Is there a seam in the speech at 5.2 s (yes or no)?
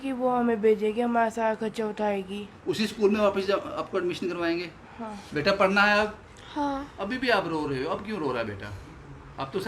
yes